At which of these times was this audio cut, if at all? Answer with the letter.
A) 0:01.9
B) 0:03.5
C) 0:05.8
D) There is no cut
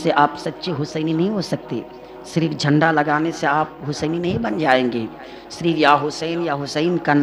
D